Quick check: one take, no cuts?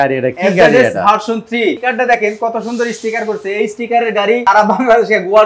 no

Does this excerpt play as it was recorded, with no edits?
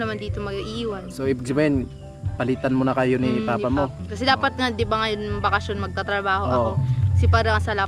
no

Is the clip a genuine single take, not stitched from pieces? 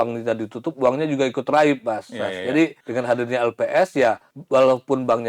no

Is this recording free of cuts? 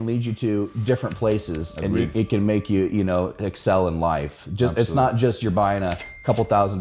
yes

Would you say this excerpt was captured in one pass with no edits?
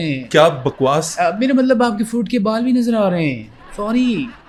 yes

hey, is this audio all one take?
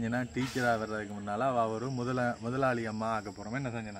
yes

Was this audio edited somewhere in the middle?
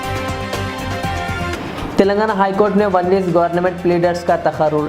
yes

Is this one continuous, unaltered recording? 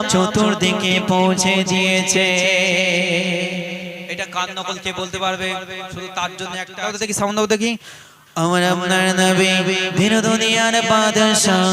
no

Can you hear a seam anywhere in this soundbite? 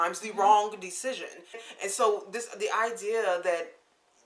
yes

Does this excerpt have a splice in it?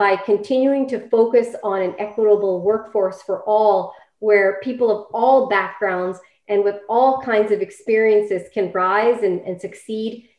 no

